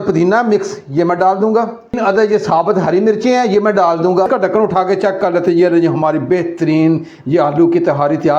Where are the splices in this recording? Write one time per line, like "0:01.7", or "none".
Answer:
0:02.0
0:04.3